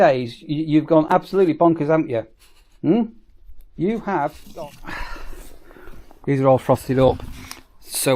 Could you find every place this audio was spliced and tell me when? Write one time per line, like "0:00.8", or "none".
0:04.4